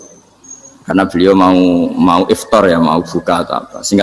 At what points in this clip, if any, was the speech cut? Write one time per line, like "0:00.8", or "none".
none